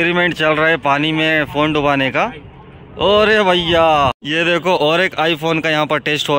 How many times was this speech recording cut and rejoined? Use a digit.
1